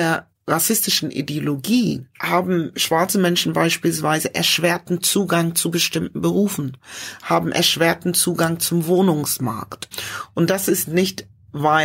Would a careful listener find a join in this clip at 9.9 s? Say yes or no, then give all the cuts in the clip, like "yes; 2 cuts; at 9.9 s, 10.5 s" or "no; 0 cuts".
yes; 2 cuts; at 2.1 s, 9.9 s